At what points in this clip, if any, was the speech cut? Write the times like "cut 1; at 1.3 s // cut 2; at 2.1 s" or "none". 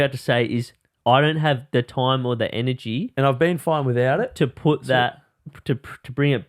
none